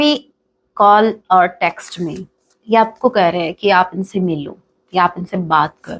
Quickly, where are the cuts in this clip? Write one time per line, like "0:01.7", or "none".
none